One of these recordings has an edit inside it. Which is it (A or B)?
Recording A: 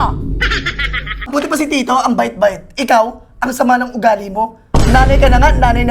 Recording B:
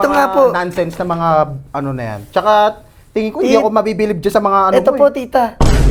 A